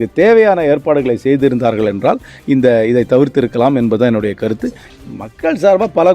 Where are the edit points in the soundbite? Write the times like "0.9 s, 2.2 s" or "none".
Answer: 4.8 s